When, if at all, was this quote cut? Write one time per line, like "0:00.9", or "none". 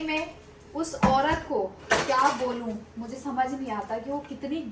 none